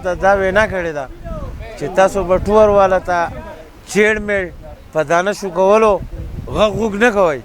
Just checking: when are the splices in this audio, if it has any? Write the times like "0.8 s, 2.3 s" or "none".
none